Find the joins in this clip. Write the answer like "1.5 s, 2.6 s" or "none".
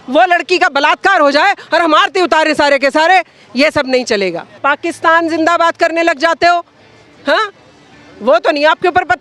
4.5 s